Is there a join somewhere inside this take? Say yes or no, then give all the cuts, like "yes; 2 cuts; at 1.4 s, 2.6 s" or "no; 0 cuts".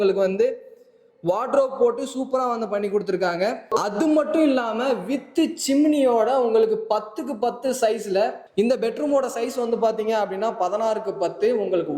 yes; 1 cut; at 8.5 s